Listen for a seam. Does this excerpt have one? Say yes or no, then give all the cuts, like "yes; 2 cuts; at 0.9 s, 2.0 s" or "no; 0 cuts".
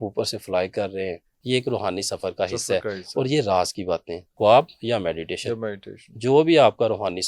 yes; 2 cuts; at 1.3 s, 4.4 s